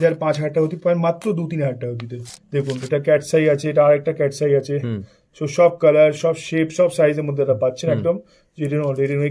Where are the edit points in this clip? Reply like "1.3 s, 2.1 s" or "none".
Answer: 2.1 s